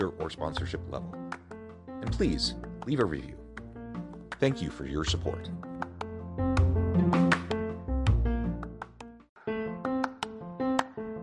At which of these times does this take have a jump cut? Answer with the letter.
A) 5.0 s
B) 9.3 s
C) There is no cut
B